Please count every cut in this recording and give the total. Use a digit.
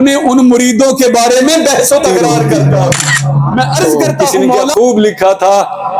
1